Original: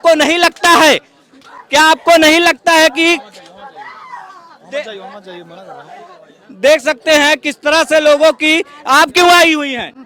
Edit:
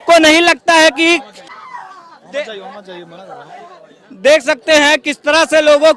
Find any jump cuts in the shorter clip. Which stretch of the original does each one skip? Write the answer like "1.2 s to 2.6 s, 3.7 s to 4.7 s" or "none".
3.5 s to 3.9 s